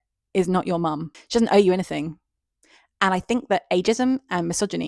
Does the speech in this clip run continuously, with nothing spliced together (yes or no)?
no